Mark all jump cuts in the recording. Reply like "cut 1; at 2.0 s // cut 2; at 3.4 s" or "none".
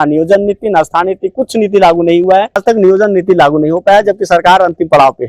cut 1; at 2.6 s

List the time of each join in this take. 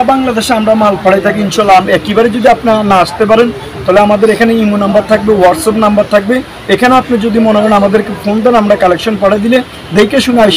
none

